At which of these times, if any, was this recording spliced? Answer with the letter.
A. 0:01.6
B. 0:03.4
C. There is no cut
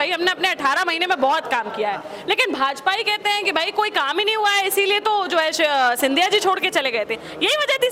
C